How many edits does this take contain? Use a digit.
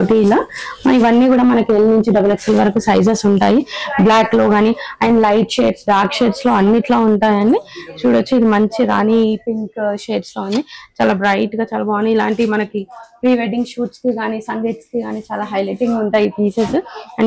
0